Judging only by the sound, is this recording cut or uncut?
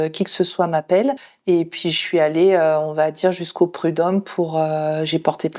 cut